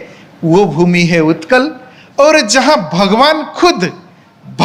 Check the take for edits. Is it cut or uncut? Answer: uncut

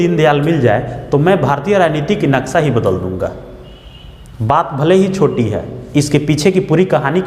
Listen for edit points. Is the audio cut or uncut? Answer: uncut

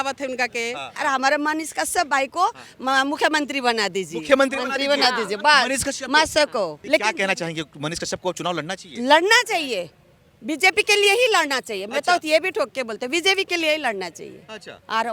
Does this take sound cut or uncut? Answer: cut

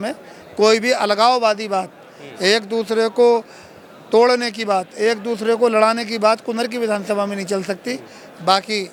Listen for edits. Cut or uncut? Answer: uncut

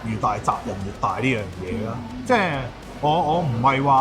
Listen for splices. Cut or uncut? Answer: uncut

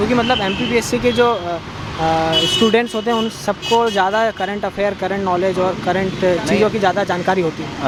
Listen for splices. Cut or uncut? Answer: uncut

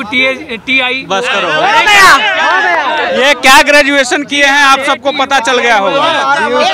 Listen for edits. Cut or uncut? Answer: uncut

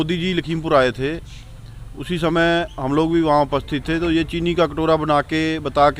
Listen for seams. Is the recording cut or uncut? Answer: uncut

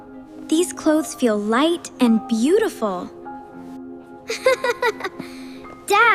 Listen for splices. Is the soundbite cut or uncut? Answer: cut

